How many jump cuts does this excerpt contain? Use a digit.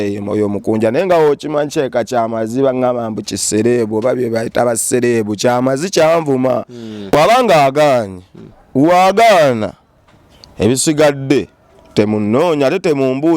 1